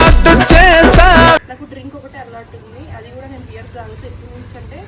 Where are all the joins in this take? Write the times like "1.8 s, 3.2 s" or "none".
1.4 s